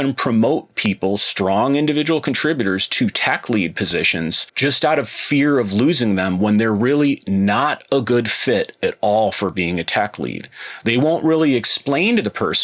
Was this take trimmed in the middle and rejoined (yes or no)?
yes